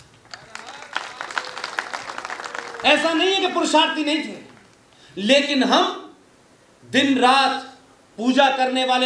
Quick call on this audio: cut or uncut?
uncut